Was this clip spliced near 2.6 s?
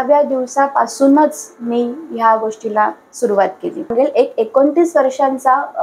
no; 1 cut; at 3.9 s

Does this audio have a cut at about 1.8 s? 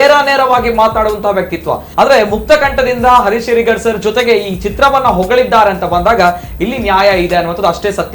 yes; 1 cut; at 1.8 s

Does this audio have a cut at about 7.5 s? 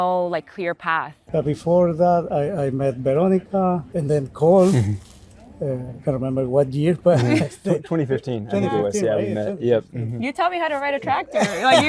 no; 2 cuts; at 1.2 s, 3.9 s

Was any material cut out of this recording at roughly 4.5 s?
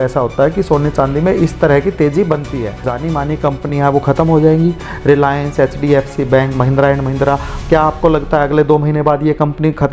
no; 1 cut; at 2.9 s

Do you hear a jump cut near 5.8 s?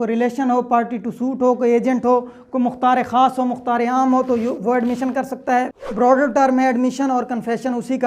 yes; 1 cut; at 5.8 s

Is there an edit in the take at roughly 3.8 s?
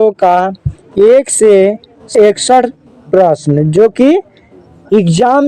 no; 1 cut; at 2.0 s

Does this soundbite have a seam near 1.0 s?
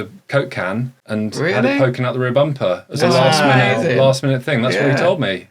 yes; 1 cut; at 1.0 s

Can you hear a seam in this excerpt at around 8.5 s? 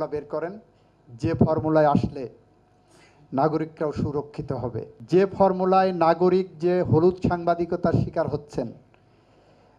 no; 1 cut; at 5.0 s

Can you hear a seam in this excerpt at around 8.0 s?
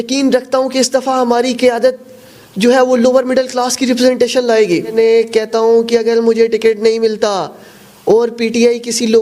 no; 1 cut; at 4.9 s

